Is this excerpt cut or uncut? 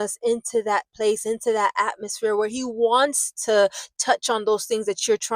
uncut